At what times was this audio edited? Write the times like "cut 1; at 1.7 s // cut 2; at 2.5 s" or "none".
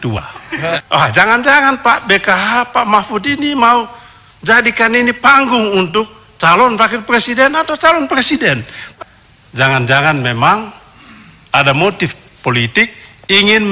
cut 1; at 0.8 s // cut 2; at 8.8 s